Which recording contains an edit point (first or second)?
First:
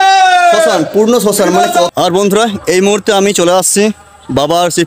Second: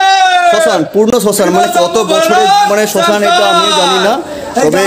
first